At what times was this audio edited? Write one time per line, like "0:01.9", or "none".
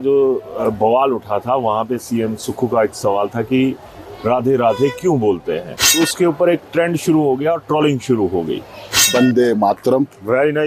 0:05.9
0:09.1